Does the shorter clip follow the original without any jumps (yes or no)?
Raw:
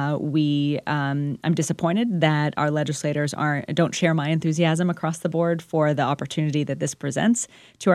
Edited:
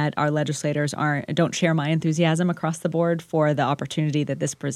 yes